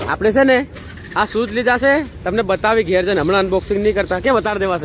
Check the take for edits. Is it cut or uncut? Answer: uncut